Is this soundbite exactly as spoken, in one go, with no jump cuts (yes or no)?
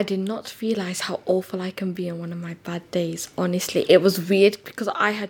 yes